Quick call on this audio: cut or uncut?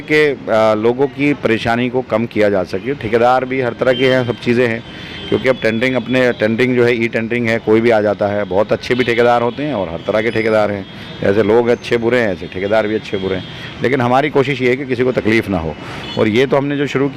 uncut